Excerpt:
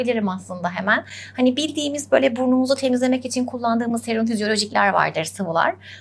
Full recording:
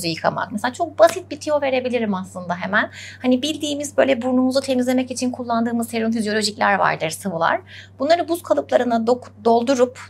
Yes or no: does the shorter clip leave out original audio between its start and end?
no